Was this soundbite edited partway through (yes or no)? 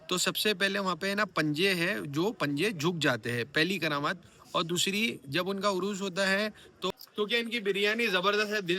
yes